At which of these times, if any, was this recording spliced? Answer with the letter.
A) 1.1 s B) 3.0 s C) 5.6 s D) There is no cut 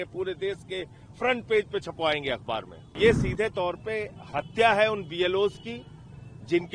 B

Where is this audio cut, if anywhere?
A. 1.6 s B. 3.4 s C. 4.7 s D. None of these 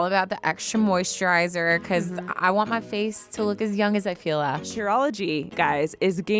C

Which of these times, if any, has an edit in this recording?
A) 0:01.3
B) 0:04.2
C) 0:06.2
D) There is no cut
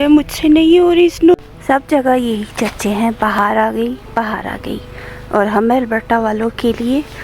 A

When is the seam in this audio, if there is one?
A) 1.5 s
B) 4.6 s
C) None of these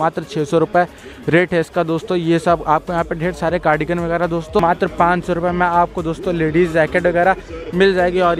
B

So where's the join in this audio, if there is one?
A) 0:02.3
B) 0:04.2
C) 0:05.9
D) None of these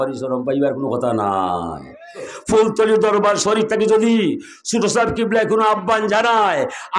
A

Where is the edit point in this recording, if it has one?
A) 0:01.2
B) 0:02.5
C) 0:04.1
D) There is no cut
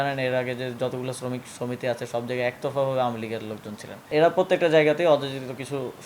C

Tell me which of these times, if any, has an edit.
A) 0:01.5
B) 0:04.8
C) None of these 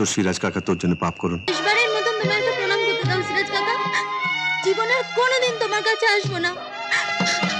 A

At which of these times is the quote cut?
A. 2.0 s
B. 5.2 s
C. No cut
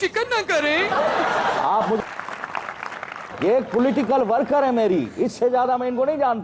A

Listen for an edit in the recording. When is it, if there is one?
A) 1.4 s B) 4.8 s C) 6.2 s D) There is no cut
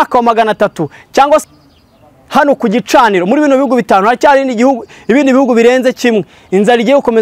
A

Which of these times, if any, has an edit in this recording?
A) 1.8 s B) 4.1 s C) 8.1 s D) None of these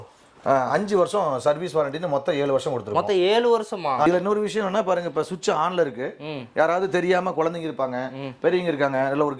B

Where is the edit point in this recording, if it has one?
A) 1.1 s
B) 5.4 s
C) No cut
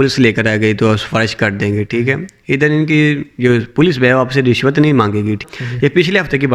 B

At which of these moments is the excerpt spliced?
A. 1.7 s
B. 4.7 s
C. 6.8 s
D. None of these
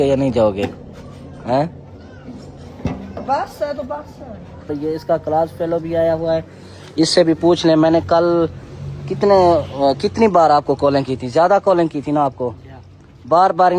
B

